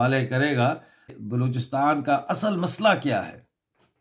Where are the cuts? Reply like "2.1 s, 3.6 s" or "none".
1.1 s